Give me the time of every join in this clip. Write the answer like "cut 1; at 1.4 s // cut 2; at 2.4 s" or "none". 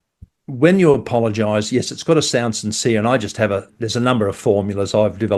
cut 1; at 3.8 s